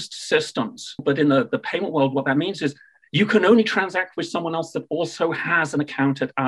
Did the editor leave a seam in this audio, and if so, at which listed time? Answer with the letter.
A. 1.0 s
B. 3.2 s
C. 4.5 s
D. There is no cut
A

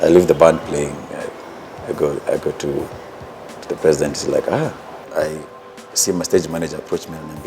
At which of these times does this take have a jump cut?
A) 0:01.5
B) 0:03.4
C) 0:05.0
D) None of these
C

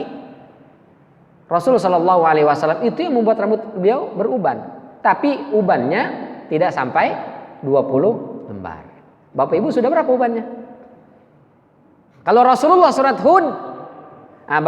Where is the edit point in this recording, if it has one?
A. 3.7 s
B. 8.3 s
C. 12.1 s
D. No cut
C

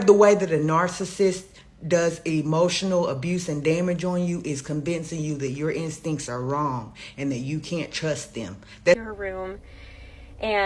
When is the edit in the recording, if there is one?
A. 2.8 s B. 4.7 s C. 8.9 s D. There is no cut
C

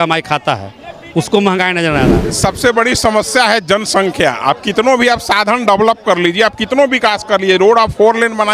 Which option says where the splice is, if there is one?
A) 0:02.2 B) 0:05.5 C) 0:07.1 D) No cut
A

